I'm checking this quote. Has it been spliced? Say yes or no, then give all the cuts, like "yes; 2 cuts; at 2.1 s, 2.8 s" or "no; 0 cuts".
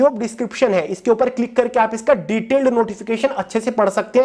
no; 0 cuts